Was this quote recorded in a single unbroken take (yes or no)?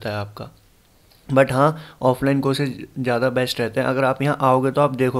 yes